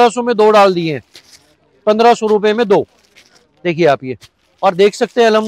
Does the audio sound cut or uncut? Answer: uncut